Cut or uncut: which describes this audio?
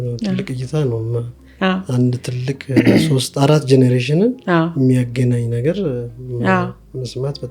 uncut